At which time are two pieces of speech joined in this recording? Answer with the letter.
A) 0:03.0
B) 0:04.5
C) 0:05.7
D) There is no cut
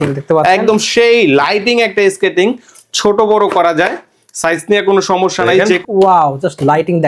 C